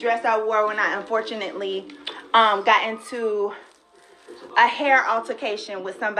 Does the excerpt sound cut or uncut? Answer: uncut